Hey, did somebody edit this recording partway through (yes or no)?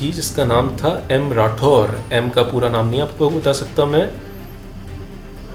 no